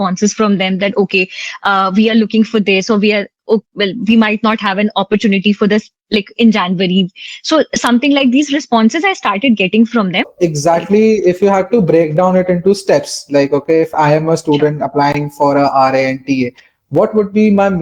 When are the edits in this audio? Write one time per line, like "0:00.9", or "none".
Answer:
0:10.3